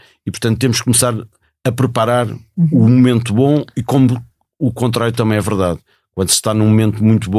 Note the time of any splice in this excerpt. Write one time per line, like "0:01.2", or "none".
none